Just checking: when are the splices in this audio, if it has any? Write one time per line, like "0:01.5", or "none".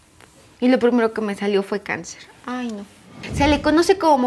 0:03.2